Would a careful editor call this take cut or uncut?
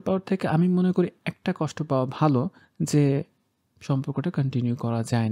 uncut